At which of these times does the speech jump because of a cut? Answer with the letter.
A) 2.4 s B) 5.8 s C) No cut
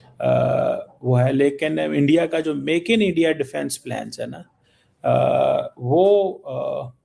C